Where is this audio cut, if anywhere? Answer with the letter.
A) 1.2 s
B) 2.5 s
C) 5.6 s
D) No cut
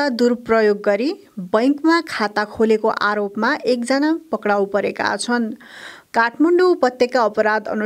D